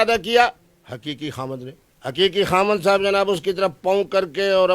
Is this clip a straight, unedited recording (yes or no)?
yes